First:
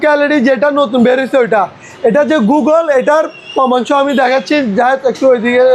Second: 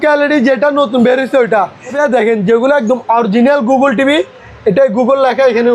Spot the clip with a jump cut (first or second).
second